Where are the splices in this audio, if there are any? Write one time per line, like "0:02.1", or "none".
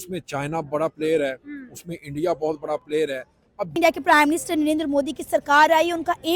0:03.8

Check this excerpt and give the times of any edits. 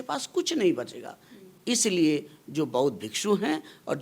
none

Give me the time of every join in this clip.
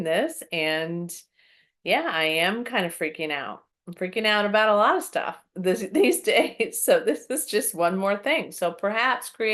none

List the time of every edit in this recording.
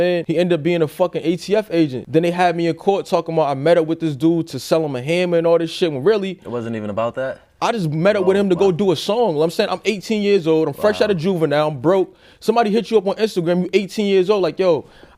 none

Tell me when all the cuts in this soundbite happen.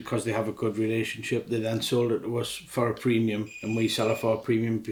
none

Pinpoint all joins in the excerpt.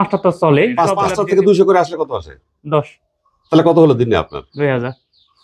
0:01.1

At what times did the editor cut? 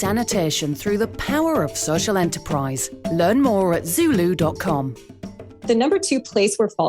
0:05.6

